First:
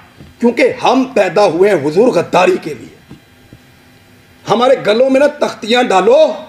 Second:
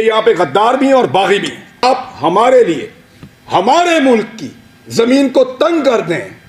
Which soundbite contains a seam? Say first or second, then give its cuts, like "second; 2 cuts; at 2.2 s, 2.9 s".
second; 1 cut; at 1.8 s